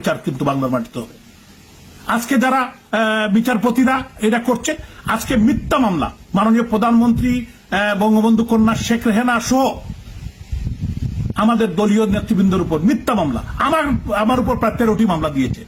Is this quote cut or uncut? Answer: uncut